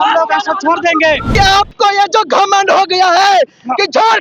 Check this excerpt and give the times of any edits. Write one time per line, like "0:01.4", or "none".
0:01.3

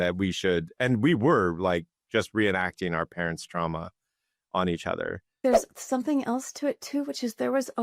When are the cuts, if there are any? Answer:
0:05.4

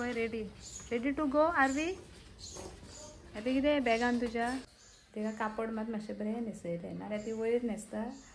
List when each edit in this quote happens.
0:04.8

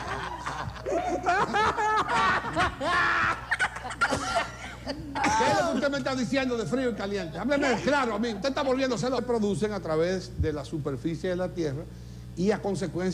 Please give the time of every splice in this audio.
none

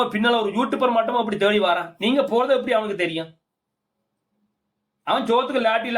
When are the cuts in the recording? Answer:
none

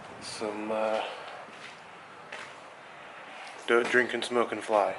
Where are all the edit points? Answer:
0:01.5

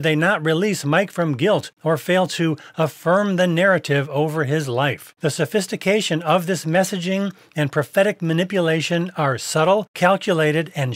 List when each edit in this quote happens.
0:01.7
0:05.1
0:09.9

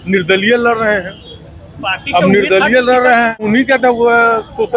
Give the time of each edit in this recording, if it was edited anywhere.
0:03.4

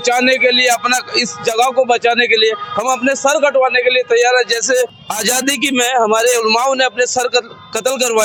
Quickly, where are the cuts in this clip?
none

